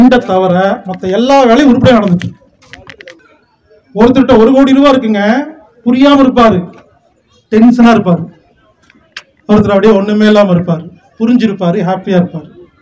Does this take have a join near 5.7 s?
no; 1 cut; at 3.2 s

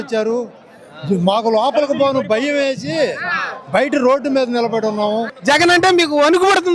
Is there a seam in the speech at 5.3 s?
yes; 1 cut; at 5.3 s

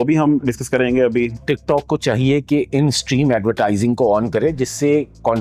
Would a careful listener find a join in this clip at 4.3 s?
no; 1 cut; at 1.4 s

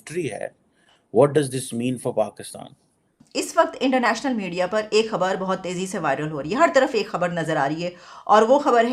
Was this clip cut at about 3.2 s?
yes; 1 cut; at 3.2 s

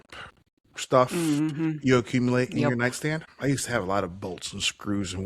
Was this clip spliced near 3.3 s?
yes; 1 cut; at 3.3 s

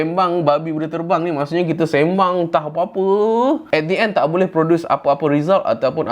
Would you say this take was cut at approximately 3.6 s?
yes; 1 cut; at 3.6 s

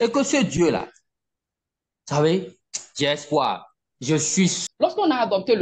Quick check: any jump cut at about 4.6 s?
yes; 1 cut; at 4.6 s

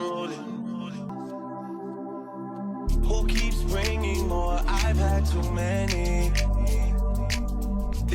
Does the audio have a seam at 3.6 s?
no; 1 cut; at 1.1 s

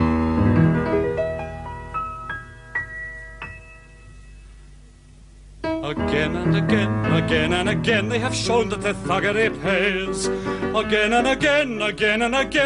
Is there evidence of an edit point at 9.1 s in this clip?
yes; 1 cut; at 9.1 s

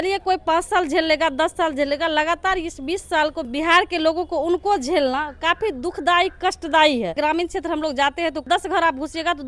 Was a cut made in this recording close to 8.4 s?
yes; 3 cuts; at 3.5 s, 7.1 s, 8.4 s

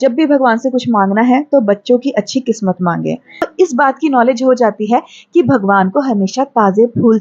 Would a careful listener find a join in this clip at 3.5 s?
yes; 1 cut; at 3.5 s

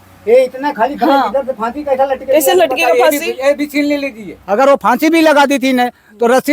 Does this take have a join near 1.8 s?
no; 1 cut; at 4.3 s

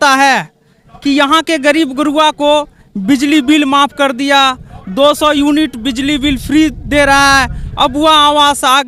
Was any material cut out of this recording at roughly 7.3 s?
no; 0 cuts

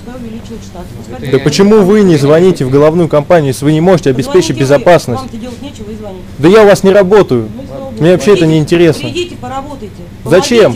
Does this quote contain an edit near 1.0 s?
no; 0 cuts

